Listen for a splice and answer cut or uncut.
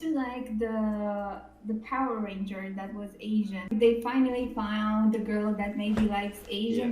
cut